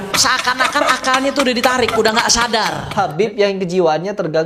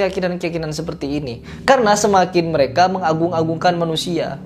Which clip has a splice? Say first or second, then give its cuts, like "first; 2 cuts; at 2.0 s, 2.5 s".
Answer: first; 1 cut; at 2.8 s